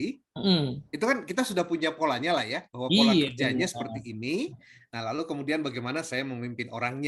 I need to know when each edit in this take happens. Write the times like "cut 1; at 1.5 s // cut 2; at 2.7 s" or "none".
none